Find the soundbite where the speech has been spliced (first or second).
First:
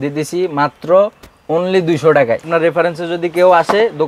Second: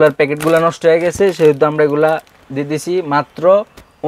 first